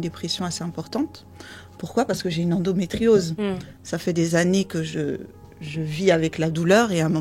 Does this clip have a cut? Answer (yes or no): no